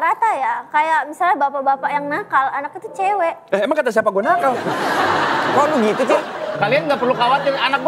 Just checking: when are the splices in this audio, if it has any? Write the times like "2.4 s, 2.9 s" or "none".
6.3 s